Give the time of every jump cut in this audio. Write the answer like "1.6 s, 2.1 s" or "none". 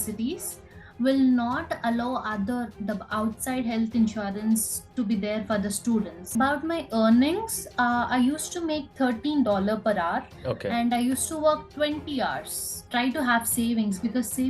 6.3 s, 12.7 s